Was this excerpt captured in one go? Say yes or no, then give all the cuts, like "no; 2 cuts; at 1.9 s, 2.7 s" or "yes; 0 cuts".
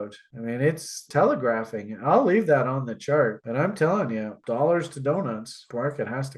no; 2 cuts; at 1.0 s, 4.3 s